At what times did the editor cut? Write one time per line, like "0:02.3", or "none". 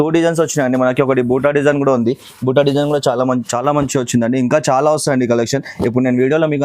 0:03.5